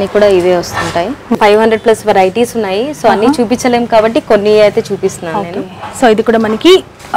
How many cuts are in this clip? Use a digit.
1